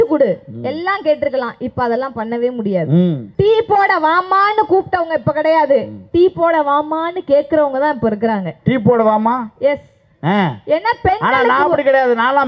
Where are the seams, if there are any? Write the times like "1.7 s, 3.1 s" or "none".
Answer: 3.2 s